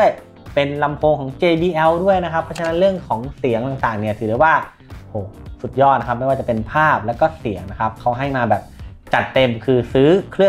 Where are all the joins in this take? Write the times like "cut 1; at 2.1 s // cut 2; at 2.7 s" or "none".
none